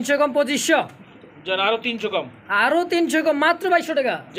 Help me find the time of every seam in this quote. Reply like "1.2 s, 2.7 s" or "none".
none